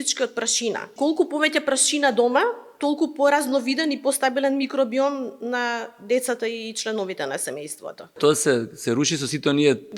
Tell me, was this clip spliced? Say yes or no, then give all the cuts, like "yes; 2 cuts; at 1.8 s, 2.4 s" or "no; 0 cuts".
yes; 2 cuts; at 0.9 s, 8.2 s